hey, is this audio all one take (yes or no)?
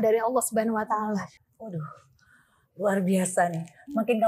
no